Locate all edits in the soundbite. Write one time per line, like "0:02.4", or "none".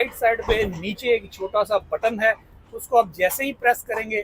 none